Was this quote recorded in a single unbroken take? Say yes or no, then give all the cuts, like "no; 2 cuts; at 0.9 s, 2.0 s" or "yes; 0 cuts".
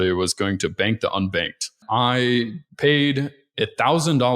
no; 2 cuts; at 1.8 s, 2.6 s